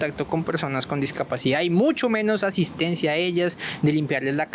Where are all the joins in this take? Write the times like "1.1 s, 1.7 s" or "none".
none